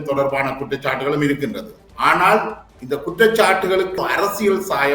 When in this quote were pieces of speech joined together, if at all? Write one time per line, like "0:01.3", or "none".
0:04.0